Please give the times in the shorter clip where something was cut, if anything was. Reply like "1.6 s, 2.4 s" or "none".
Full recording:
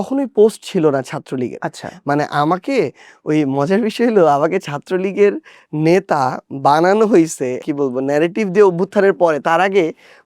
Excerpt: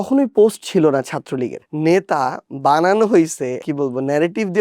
1.6 s